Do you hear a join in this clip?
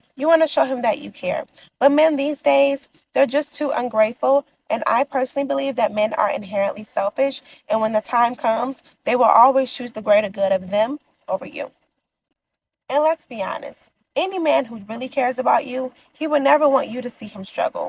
yes; 1 cut; at 7.5 s

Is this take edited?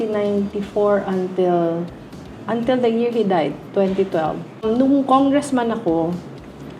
yes; 1 cut; at 4.5 s

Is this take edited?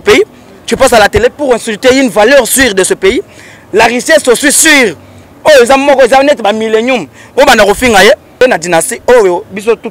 yes; 1 cut; at 8.4 s

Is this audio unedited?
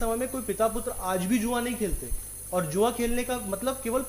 yes; 0 cuts

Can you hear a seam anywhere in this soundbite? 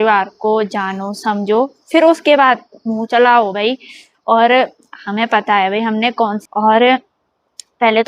yes; 1 cut; at 6.4 s

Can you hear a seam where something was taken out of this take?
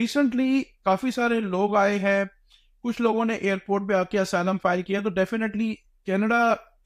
no; 0 cuts

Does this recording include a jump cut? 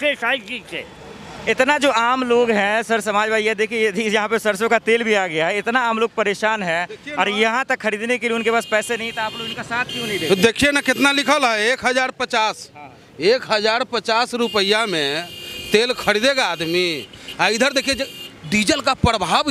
no; 0 cuts

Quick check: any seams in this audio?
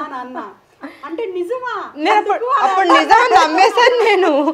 no; 0 cuts

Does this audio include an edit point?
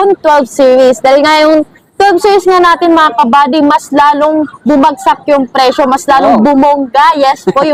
no; 0 cuts

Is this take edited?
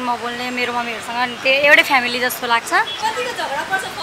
yes; 1 cut; at 3.0 s

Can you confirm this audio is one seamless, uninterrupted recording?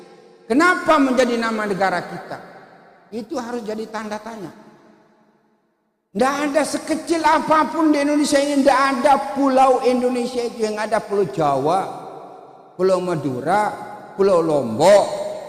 yes; 0 cuts

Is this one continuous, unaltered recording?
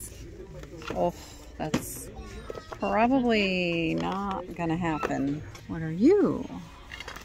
no; 1 cut; at 5.5 s

